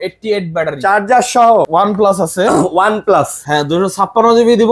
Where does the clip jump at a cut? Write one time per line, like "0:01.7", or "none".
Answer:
0:01.7
0:03.4

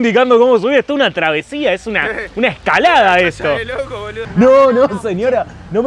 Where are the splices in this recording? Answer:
0:04.1

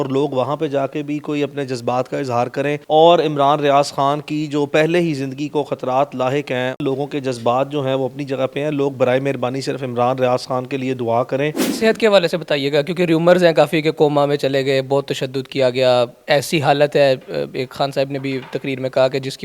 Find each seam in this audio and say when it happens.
0:02.8
0:06.8
0:11.6

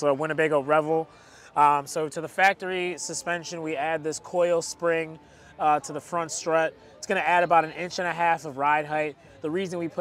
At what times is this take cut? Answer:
none

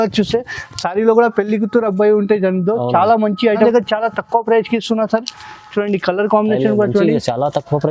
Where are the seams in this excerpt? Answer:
0:03.7

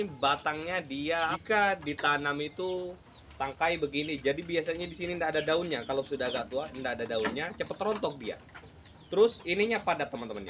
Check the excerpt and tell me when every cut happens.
0:01.4

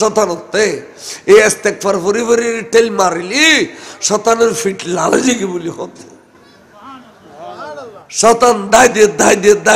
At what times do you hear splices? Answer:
none

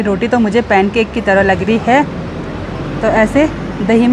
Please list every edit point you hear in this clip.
none

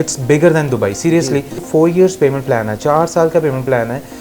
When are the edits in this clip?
0:01.6

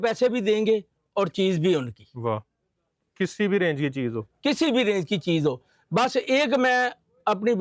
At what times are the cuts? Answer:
none

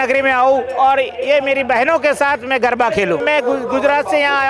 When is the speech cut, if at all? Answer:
0:03.2

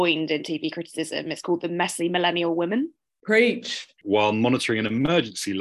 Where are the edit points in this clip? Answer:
0:03.9

